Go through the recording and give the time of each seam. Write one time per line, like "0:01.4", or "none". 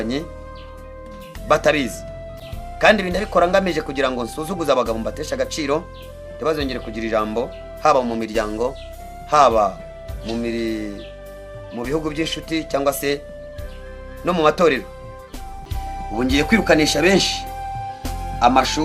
0:15.8